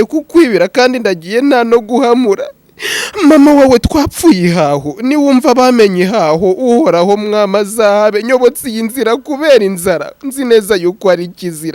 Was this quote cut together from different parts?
no; 0 cuts

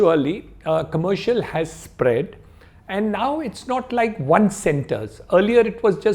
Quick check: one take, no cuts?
yes; 0 cuts

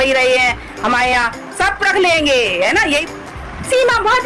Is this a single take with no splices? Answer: no; 1 cut; at 3.0 s

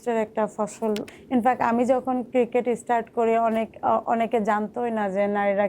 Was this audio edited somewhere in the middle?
yes; 1 cut; at 1.1 s

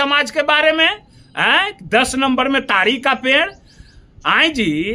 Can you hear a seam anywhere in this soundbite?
no; 0 cuts

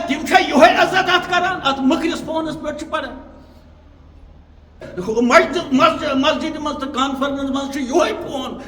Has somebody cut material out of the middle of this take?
yes; 1 cut; at 4.8 s

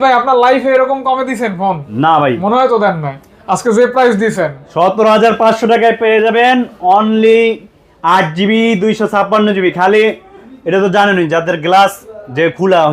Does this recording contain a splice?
no; 0 cuts

